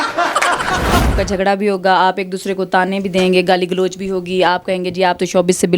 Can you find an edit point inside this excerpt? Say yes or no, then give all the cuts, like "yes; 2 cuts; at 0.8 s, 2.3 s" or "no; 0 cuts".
yes; 1 cut; at 1.1 s